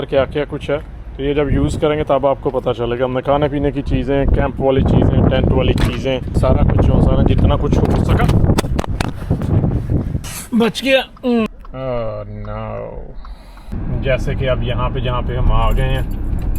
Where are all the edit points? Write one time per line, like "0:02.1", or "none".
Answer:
0:06.4
0:10.3
0:11.5
0:13.7